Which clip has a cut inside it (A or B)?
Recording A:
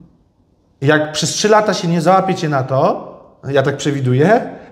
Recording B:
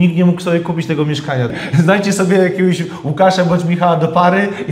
B